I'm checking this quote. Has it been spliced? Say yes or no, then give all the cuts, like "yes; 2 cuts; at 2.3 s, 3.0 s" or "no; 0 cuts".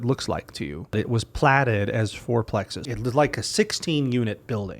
yes; 2 cuts; at 0.9 s, 2.8 s